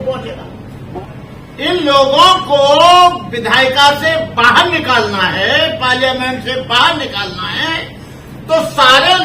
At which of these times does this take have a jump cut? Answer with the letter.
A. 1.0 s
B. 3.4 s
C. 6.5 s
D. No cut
A